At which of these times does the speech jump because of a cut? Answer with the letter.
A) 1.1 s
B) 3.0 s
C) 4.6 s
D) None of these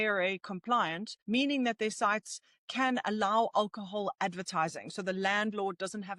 A